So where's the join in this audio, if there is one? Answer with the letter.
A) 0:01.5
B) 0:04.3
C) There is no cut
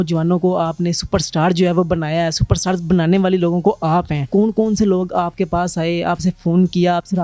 B